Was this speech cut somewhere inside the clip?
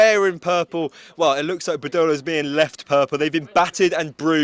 no; 0 cuts

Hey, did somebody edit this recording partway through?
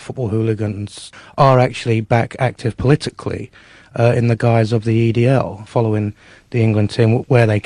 yes; 2 cuts; at 1.0 s, 5.6 s

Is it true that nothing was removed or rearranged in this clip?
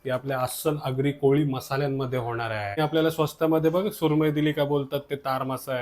no; 1 cut; at 2.8 s

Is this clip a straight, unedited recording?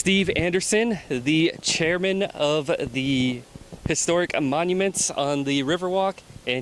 yes; 0 cuts

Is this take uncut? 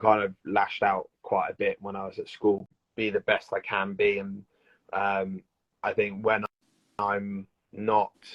no; 1 cut; at 2.6 s

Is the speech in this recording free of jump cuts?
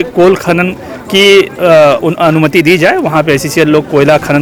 yes; 0 cuts

